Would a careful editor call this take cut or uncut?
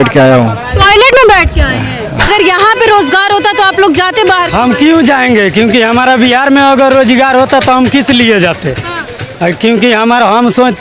cut